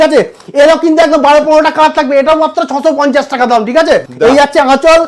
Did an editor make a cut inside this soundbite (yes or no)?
yes